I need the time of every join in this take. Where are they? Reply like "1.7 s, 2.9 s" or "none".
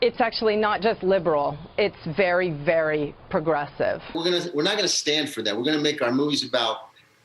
4.1 s